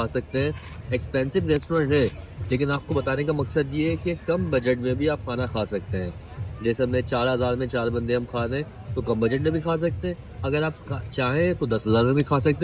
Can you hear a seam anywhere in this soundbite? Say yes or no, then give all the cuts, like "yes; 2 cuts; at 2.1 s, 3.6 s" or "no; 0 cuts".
no; 0 cuts